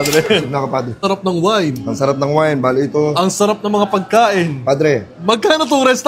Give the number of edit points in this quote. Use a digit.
1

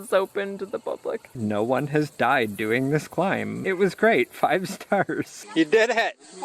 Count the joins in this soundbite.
3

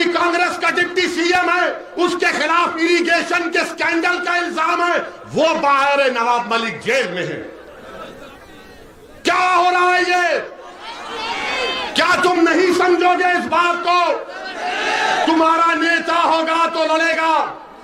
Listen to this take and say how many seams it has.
0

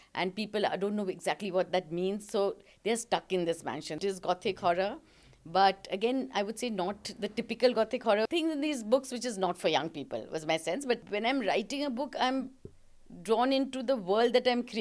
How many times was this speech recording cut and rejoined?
3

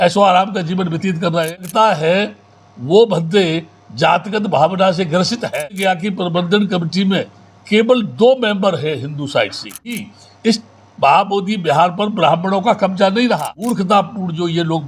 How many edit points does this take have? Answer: 4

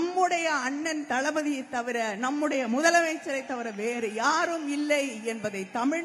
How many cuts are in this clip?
0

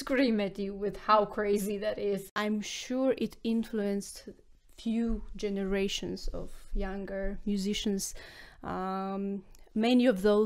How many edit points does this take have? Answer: 1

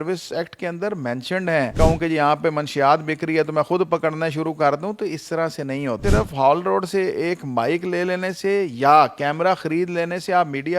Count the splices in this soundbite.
2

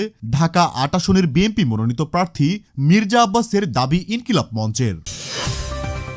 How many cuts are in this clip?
1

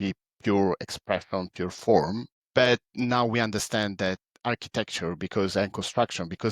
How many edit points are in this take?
1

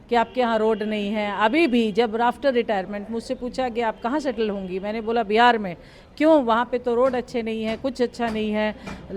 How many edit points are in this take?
0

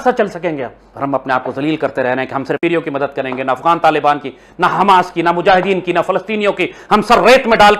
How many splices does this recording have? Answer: 1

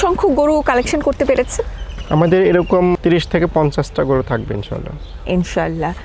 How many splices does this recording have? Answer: 0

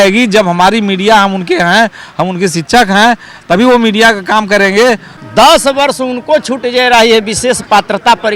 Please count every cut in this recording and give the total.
1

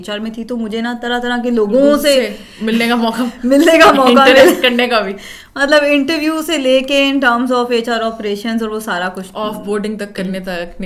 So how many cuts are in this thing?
0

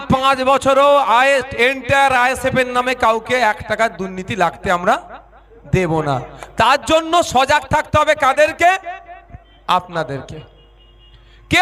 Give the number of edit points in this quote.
0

